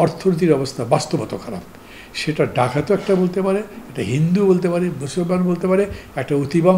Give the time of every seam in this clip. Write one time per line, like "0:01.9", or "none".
none